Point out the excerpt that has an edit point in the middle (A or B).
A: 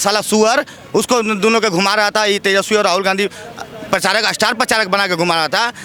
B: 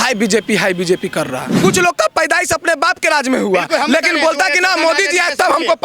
B